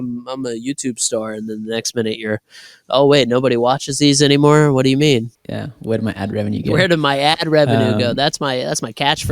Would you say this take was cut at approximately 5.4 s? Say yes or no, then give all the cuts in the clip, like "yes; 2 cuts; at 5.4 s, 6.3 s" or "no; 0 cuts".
yes; 1 cut; at 5.4 s